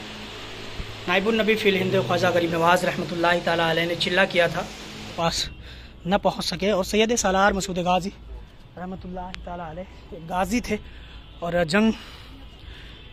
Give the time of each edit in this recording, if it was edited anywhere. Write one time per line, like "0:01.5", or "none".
0:05.2